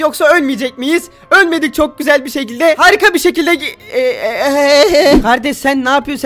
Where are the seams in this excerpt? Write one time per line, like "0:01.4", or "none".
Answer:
0:05.2